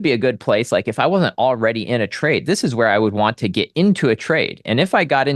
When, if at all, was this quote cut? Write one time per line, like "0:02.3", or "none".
none